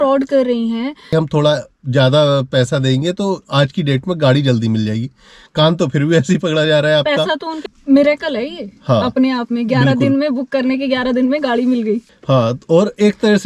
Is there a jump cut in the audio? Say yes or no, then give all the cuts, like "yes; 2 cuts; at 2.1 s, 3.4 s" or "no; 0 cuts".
yes; 3 cuts; at 1.1 s, 7.6 s, 12.1 s